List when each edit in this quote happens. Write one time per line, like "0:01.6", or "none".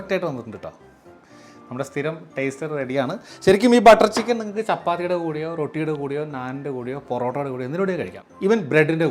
0:08.2